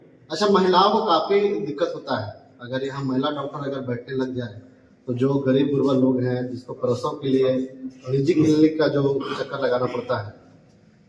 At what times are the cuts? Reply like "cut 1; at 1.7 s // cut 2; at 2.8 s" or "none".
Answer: none